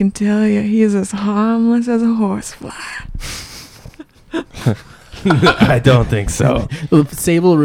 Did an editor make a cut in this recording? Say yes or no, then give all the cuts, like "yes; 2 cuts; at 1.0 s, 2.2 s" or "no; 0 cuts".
no; 0 cuts